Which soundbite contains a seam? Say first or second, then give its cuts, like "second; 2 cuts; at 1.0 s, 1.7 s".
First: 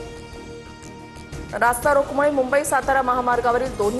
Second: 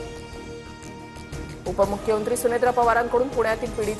first; 1 cut; at 1.5 s